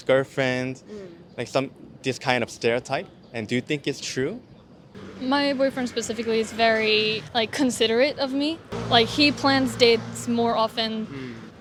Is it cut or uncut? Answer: uncut